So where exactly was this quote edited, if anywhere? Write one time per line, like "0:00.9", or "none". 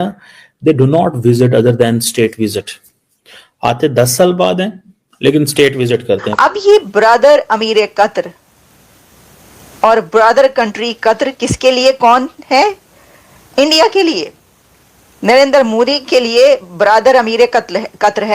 0:06.3

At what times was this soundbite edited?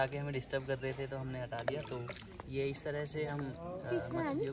none

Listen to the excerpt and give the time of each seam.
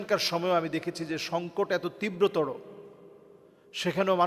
none

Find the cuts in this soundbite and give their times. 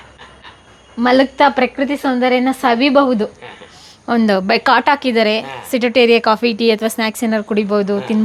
none

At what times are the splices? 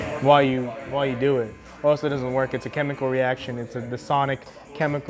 none

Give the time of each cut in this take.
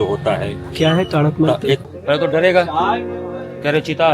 0:01.8

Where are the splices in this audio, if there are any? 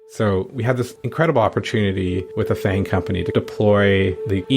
0:01.0
0:02.3

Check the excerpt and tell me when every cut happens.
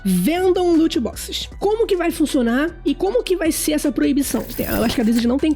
0:01.4
0:03.0
0:04.6

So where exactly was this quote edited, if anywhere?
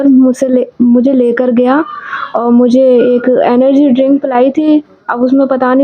none

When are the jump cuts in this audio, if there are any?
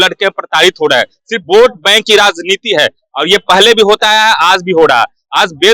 none

